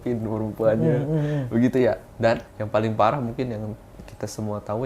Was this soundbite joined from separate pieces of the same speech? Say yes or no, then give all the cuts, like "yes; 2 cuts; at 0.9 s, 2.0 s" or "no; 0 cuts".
yes; 1 cut; at 2.5 s